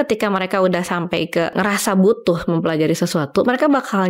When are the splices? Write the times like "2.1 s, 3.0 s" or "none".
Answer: 1.5 s